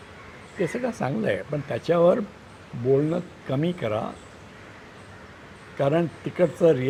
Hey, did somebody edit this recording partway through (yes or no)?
no